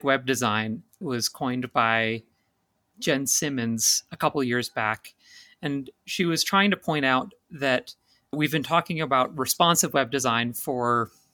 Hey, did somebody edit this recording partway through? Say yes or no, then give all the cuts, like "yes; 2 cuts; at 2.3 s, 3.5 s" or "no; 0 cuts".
yes; 3 cuts; at 1.0 s, 2.9 s, 8.3 s